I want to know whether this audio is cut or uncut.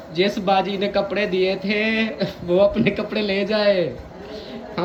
uncut